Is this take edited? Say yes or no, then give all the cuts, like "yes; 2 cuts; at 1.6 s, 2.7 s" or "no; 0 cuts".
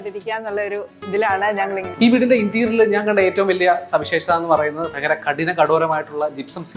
yes; 1 cut; at 1.8 s